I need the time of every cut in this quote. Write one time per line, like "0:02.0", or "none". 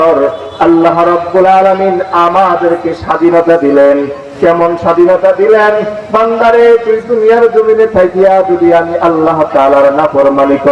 none